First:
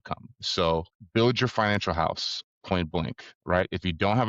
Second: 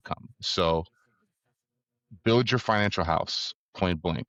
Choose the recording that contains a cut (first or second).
first